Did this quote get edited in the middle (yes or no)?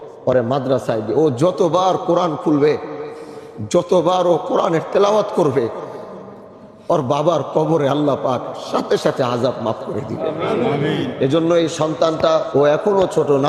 yes